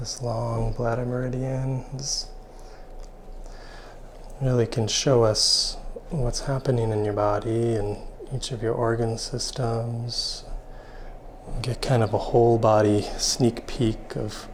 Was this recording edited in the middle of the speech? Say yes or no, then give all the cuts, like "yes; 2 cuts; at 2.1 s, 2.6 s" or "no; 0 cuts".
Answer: no; 0 cuts